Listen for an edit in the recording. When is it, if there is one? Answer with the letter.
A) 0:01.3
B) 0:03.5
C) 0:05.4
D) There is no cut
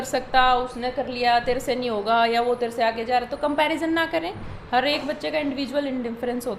D